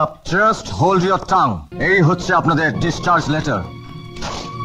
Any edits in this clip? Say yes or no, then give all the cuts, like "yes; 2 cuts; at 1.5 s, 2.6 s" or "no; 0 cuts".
yes; 1 cut; at 1.7 s